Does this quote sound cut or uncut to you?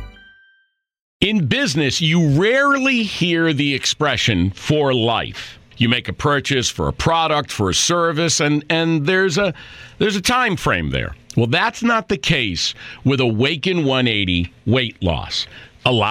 cut